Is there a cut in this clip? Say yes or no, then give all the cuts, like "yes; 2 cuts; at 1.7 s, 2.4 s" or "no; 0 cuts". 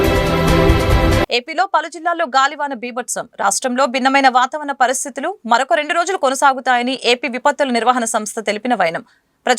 no; 0 cuts